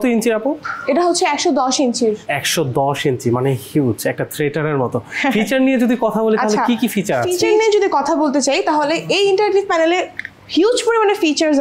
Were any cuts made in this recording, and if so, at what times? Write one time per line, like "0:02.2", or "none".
none